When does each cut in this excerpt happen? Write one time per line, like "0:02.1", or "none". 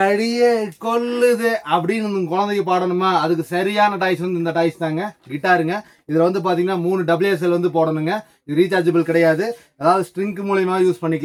none